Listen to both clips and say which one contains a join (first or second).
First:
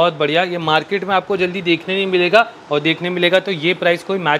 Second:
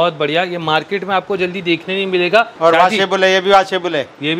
second